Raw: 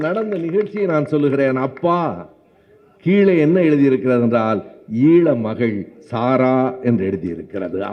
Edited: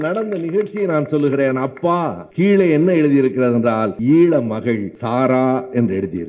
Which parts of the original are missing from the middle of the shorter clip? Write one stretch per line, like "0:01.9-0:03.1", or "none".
0:02.2-0:02.9
0:04.6-0:04.9
0:05.9-0:06.0